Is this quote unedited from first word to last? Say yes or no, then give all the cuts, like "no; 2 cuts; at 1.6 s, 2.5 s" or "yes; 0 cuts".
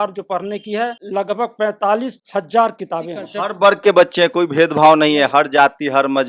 no; 3 cuts; at 0.9 s, 2.2 s, 3.3 s